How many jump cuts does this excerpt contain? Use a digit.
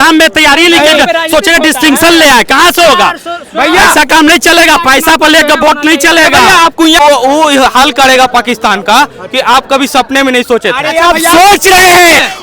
1